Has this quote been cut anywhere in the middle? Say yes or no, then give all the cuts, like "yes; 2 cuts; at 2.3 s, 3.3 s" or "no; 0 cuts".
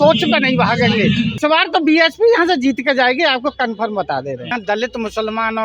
yes; 2 cuts; at 1.4 s, 4.5 s